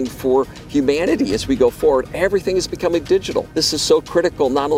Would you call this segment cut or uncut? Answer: cut